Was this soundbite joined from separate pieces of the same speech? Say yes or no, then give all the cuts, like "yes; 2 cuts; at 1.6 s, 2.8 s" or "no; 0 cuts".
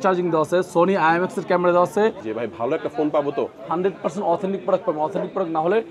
yes; 1 cut; at 2.2 s